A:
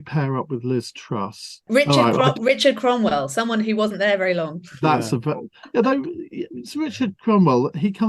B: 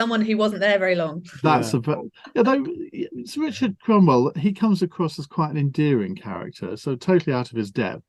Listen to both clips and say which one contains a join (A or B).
A